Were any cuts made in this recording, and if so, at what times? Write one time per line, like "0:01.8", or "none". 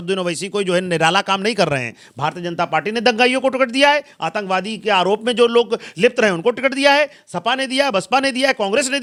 none